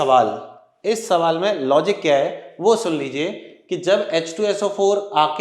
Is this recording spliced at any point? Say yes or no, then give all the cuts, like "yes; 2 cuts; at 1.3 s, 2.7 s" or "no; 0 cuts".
no; 0 cuts